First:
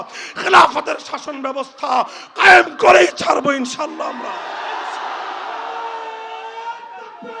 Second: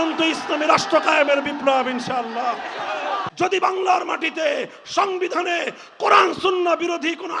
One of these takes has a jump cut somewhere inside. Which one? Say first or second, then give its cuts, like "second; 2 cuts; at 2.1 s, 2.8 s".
second; 1 cut; at 3.2 s